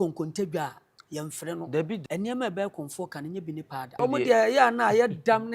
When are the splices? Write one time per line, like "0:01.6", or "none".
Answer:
0:02.0
0:04.0

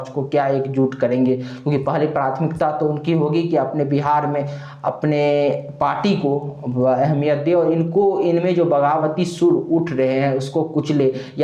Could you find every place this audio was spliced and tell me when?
none

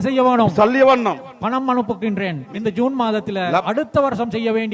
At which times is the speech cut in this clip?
0:02.5
0:03.6

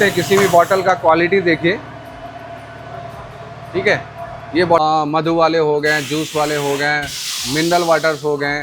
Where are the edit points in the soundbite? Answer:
0:04.8

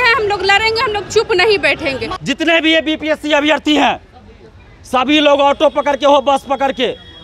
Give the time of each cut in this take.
0:02.1

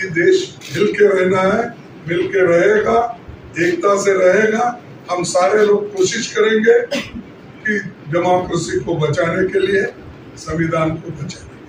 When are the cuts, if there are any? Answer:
none

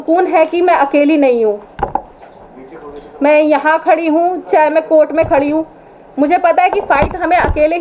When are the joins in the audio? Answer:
none

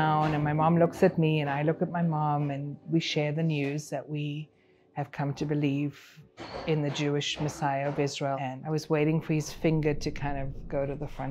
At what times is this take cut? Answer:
0:08.4

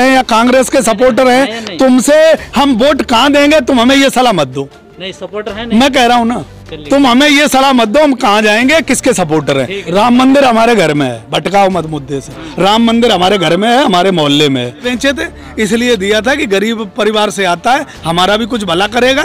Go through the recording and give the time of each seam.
0:09.8
0:14.9

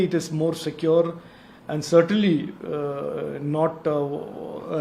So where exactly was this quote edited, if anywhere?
none

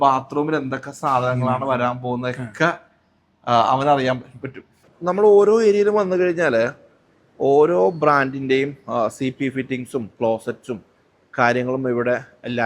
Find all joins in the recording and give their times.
0:04.8

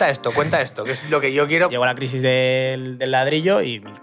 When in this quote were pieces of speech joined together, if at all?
0:01.7

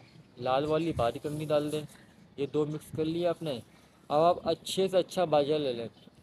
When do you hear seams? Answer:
none

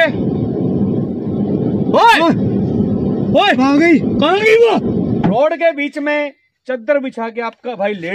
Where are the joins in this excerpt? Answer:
0:05.3

